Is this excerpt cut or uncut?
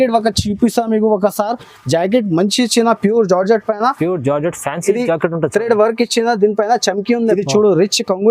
cut